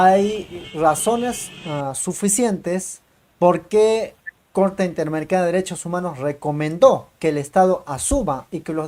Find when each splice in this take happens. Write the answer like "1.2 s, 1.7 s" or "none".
none